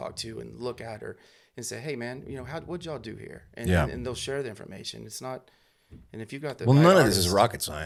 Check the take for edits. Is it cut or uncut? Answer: uncut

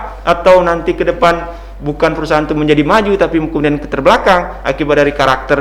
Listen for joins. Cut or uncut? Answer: uncut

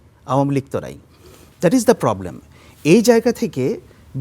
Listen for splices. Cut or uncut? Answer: uncut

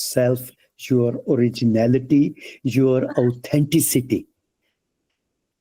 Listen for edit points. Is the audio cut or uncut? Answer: uncut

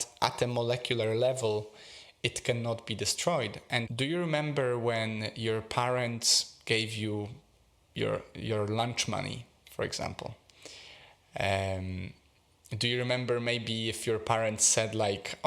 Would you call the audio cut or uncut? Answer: cut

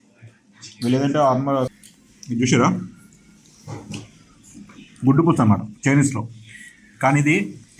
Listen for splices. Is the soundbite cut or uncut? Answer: cut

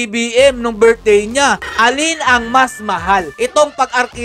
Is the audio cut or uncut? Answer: cut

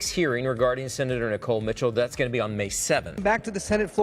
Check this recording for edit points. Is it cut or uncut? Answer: uncut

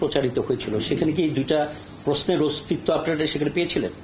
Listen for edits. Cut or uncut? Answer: uncut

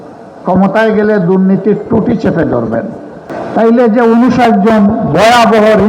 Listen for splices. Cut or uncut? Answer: cut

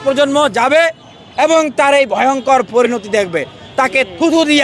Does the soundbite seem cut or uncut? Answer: uncut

